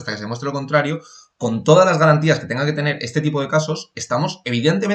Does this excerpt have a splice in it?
no; 0 cuts

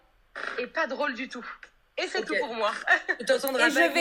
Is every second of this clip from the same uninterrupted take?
yes; 0 cuts

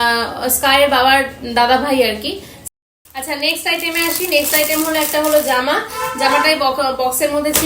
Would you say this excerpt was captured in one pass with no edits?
no; 1 cut; at 2.6 s

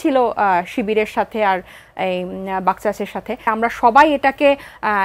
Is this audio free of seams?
no; 1 cut; at 3.5 s

